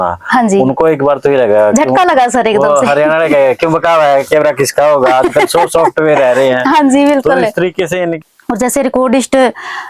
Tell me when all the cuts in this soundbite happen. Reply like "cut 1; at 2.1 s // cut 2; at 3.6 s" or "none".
cut 1; at 8.2 s